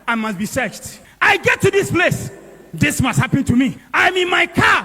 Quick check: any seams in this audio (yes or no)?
yes